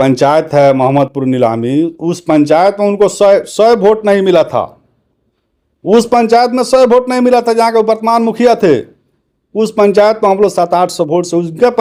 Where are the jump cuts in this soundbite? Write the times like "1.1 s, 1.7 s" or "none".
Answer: none